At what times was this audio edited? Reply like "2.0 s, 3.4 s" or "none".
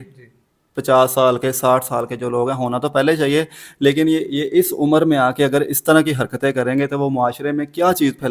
none